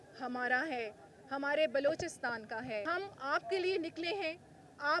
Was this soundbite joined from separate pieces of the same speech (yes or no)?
yes